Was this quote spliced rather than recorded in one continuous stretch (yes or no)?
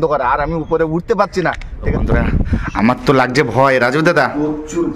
yes